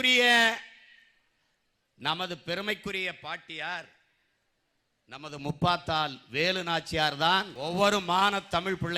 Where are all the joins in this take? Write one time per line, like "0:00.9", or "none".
0:07.5